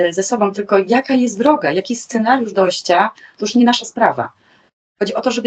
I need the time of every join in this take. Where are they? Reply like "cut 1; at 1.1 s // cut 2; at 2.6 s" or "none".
none